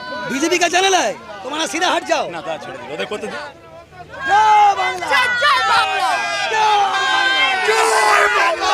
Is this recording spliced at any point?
yes; 1 cut; at 3.4 s

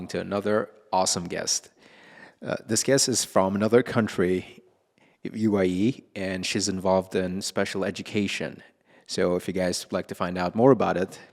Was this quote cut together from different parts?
no; 0 cuts

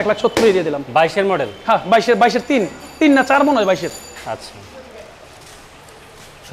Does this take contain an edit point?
no; 0 cuts

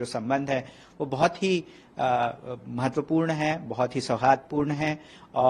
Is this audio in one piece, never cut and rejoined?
yes; 0 cuts

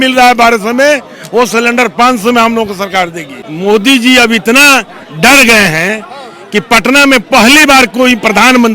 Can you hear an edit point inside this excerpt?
yes; 1 cut; at 3.4 s

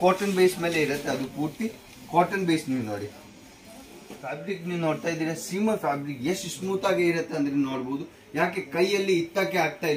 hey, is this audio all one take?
no; 1 cut; at 4.4 s

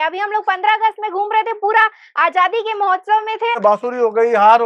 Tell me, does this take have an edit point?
yes; 1 cut; at 3.6 s

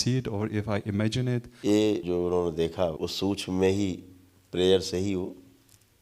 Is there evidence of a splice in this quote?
yes; 3 cuts; at 1.5 s, 2.0 s, 3.0 s

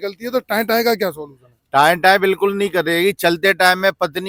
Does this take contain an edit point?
no; 0 cuts

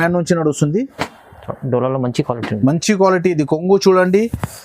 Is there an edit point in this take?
yes; 1 cut; at 1.0 s

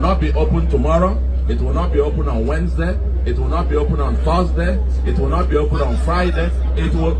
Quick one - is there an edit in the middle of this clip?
no; 0 cuts

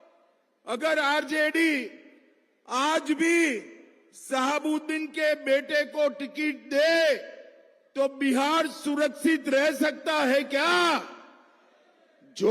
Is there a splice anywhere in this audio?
no; 0 cuts

